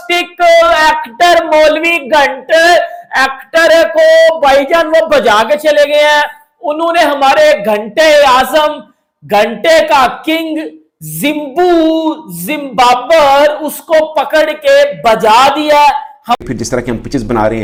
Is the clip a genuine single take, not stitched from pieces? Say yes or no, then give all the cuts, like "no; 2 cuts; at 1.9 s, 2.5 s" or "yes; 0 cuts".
yes; 0 cuts